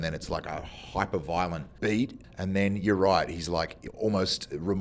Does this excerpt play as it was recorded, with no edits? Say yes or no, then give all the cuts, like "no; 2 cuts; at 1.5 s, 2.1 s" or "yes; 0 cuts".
no; 1 cut; at 2.2 s